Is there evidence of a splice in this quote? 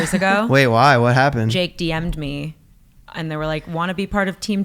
yes; 1 cut; at 1.5 s

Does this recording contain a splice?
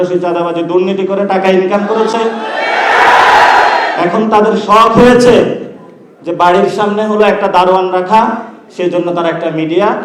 no; 0 cuts

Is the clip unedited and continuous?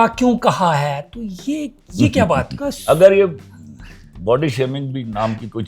no; 1 cut; at 2.7 s

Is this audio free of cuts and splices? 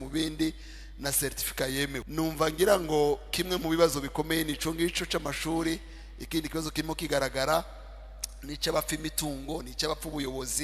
no; 1 cut; at 2.1 s

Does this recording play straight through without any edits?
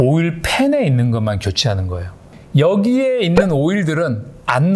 yes; 0 cuts

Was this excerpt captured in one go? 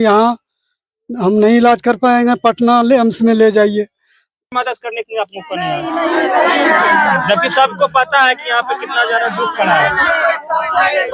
no; 1 cut; at 4.5 s

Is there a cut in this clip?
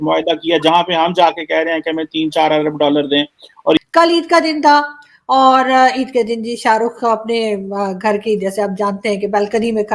yes; 1 cut; at 3.8 s

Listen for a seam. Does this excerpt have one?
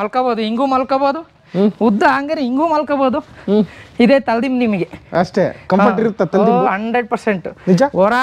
no; 0 cuts

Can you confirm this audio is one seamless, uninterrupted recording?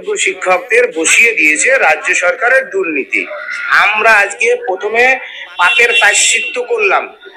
no; 1 cut; at 3.5 s

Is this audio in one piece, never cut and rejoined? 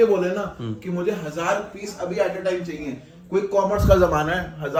yes; 0 cuts

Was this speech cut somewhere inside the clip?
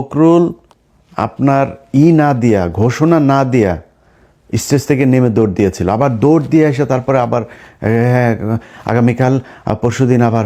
no; 0 cuts

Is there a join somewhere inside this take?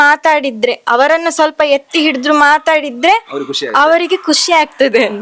no; 0 cuts

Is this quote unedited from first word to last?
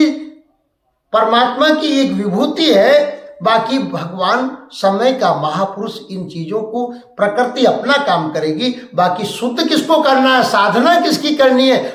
yes; 0 cuts

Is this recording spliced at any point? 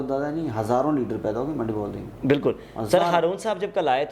no; 0 cuts

